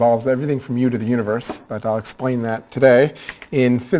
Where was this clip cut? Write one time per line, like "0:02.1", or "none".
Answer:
0:02.7